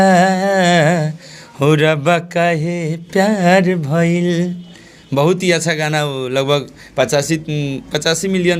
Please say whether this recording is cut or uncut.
uncut